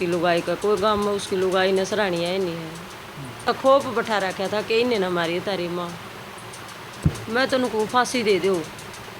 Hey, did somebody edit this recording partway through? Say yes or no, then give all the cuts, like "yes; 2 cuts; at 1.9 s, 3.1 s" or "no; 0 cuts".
yes; 2 cuts; at 3.5 s, 7.0 s